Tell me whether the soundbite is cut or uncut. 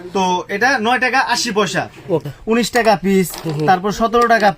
cut